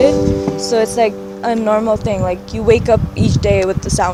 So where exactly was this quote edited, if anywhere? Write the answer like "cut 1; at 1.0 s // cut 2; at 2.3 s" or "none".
none